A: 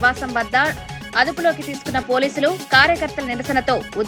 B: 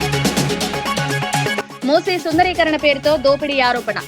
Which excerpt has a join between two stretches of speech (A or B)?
B